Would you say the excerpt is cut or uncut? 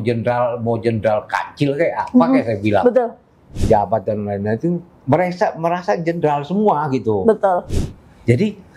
cut